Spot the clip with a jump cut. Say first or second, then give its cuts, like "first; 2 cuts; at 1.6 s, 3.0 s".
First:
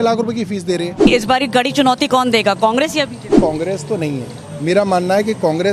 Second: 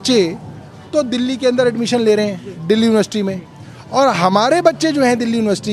first; 2 cuts; at 1.1 s, 3.4 s